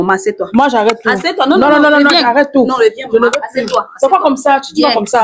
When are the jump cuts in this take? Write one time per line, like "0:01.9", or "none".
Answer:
none